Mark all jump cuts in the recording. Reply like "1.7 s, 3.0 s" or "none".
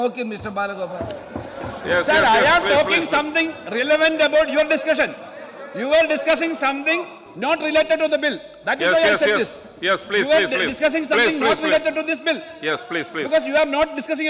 none